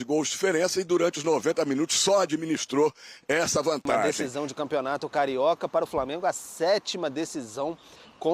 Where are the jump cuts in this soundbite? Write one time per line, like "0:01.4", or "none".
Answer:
0:04.2